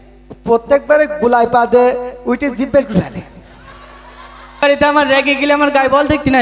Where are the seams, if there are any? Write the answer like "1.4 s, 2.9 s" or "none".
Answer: 4.6 s

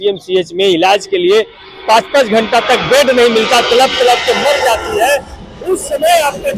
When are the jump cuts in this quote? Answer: none

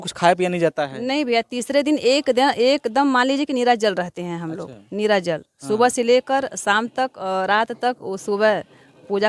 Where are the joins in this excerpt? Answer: none

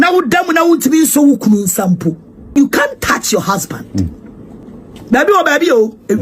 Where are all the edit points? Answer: 2.5 s, 4.6 s

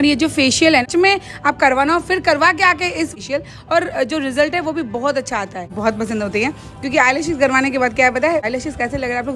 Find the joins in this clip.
0.8 s, 3.1 s, 5.7 s, 8.4 s

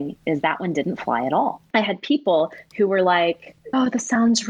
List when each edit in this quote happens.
1.6 s, 3.7 s

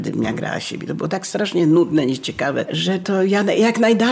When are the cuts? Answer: 3.0 s

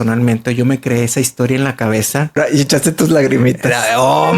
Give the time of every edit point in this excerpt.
2.4 s

